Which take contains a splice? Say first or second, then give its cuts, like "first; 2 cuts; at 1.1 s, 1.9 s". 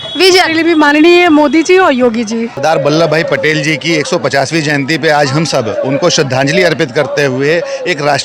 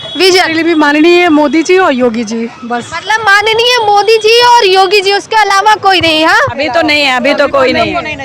first; 1 cut; at 2.5 s